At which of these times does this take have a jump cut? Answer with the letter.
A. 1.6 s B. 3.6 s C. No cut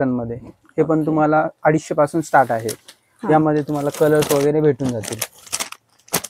C